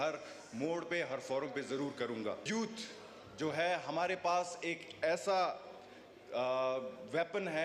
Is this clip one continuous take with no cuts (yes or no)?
no